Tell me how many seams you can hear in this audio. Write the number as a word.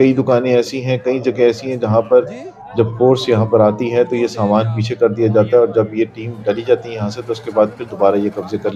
zero